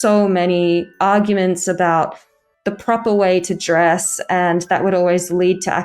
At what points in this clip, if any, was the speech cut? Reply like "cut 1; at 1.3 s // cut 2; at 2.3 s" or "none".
none